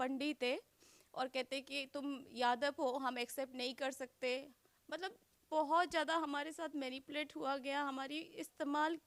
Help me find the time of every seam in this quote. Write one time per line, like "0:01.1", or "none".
none